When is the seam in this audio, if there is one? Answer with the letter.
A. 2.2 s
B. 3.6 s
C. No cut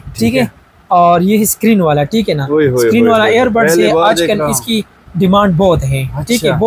C